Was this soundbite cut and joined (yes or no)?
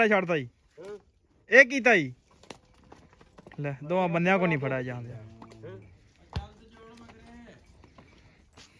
no